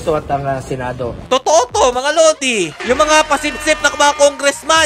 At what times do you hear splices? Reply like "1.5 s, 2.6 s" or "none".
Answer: 1.1 s, 2.8 s

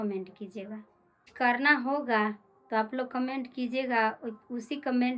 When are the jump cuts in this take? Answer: 1.3 s

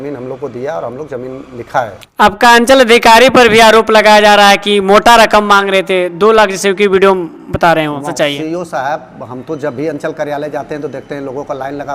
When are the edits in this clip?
2.0 s, 8.1 s

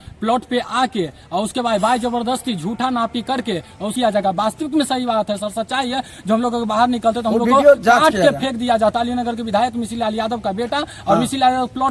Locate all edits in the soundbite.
3.9 s

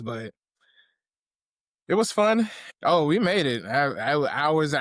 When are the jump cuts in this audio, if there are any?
2.7 s

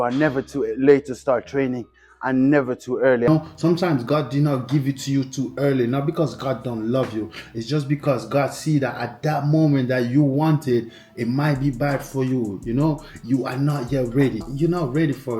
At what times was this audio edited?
3.3 s, 14.5 s

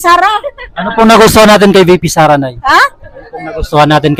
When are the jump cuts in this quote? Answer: none

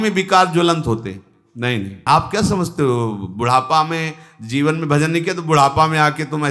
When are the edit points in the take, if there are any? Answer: 2.0 s

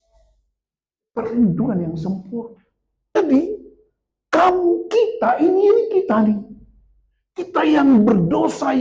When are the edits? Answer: 3.1 s

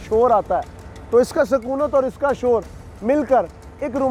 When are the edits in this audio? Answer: none

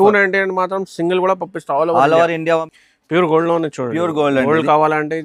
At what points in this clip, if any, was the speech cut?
2.7 s

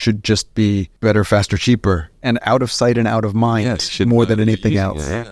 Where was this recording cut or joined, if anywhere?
0.9 s, 2.1 s

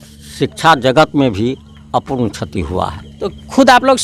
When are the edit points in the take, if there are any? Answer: none

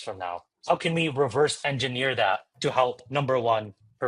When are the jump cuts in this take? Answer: 2.5 s

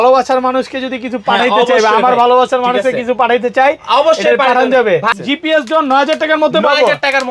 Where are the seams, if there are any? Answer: 5.1 s

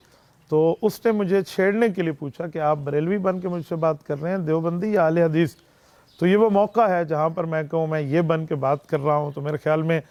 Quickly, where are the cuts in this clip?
none

